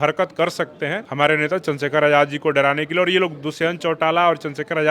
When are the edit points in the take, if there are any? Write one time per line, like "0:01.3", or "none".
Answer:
0:01.0